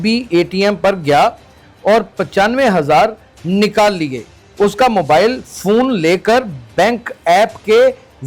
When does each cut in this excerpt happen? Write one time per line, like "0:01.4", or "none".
0:04.4

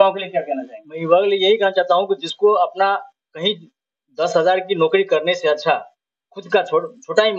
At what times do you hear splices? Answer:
none

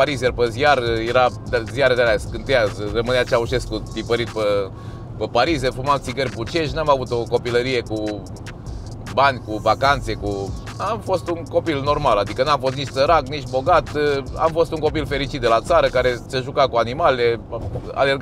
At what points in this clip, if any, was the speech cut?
none

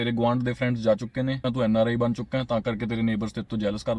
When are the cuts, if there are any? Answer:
0:01.5

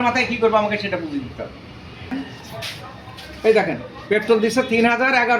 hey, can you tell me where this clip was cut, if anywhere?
0:02.1

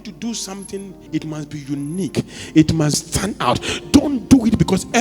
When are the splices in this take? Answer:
0:01.0

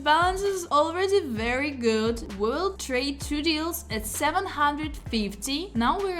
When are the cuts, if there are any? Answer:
none

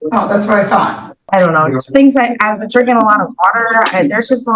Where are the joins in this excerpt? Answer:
0:01.2

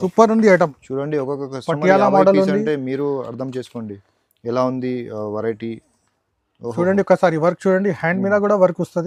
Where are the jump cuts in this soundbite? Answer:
none

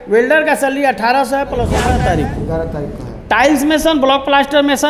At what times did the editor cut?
0:01.8

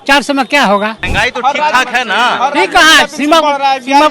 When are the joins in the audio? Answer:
0:01.0

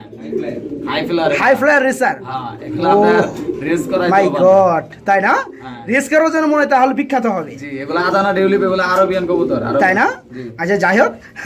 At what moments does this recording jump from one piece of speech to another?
none

